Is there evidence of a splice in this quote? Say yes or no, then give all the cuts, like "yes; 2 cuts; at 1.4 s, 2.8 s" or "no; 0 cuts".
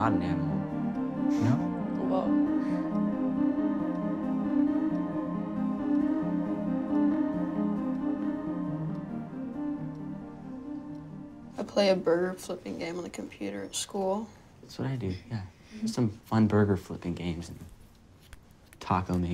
yes; 1 cut; at 9.3 s